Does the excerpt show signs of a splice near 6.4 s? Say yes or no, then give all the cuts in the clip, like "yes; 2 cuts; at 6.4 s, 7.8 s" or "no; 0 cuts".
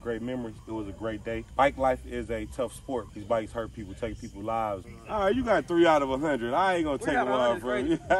no; 3 cuts; at 1.2 s, 3.1 s, 4.9 s